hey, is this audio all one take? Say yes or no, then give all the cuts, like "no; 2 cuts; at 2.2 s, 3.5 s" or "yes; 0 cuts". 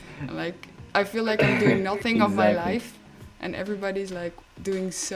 yes; 0 cuts